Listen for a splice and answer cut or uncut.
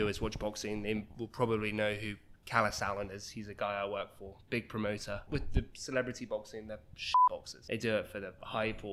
cut